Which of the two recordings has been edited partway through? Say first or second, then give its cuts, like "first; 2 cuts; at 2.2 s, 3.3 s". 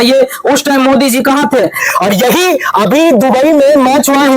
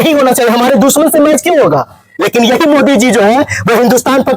first; 1 cut; at 1.8 s